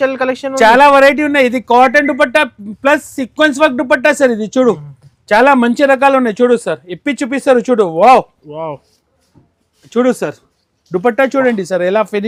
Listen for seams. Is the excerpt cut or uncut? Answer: uncut